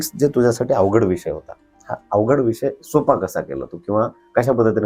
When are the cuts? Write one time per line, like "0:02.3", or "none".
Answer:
none